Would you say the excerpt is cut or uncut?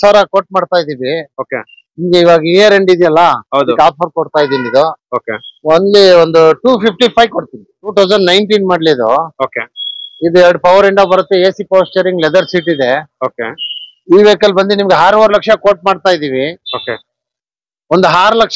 cut